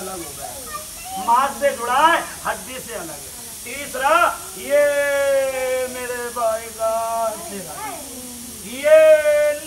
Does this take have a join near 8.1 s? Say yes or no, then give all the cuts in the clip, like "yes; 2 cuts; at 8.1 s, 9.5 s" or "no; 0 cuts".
no; 0 cuts